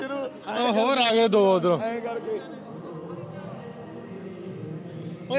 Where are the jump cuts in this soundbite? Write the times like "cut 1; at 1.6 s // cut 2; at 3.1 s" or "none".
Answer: none